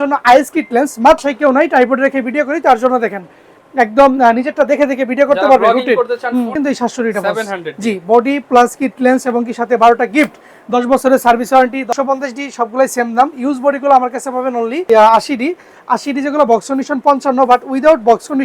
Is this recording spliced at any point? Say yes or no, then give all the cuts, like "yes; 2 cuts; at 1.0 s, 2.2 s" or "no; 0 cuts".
yes; 4 cuts; at 1.2 s, 6.5 s, 11.9 s, 14.8 s